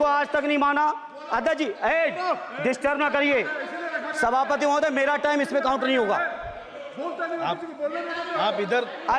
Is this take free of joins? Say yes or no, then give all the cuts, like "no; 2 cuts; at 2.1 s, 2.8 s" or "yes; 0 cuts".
yes; 0 cuts